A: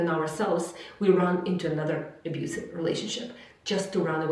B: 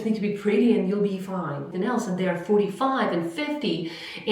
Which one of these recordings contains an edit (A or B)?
B